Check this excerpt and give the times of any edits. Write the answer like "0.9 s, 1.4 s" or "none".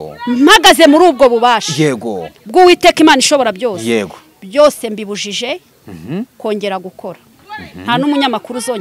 7.3 s